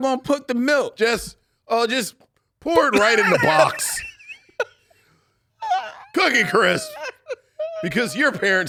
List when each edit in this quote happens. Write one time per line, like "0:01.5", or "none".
none